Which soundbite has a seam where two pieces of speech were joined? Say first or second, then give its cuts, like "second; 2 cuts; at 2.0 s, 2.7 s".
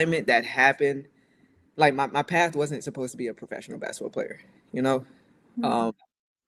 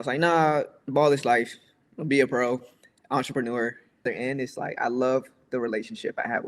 second; 1 cut; at 4.0 s